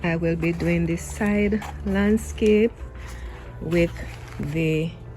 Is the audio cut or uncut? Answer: uncut